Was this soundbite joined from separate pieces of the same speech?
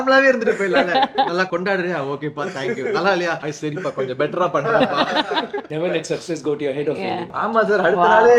yes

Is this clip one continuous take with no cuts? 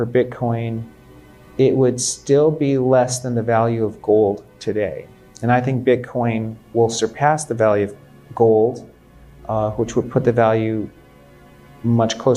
yes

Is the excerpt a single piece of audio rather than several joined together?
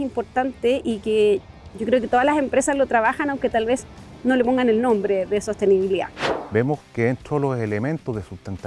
no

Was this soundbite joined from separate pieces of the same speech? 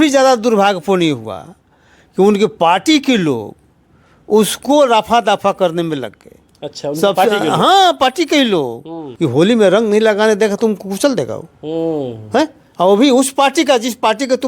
yes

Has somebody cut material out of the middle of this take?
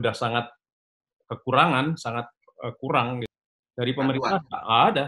yes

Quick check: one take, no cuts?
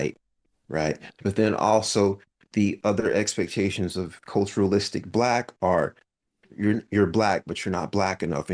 yes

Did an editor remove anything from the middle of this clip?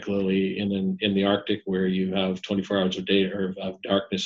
no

